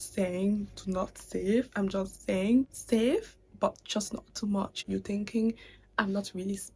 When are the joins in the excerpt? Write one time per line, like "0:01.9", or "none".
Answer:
0:02.8
0:04.8